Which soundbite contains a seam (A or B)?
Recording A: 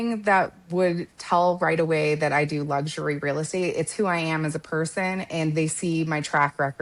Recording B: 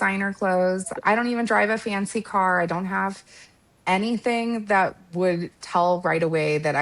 B